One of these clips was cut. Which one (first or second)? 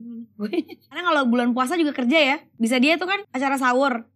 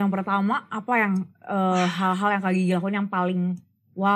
first